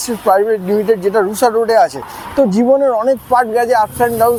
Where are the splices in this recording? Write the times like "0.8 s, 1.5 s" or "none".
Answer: none